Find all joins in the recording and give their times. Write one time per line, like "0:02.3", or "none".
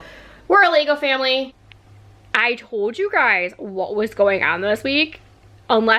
0:01.6